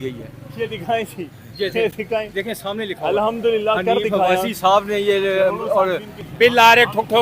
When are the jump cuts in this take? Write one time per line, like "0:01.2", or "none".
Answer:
0:06.2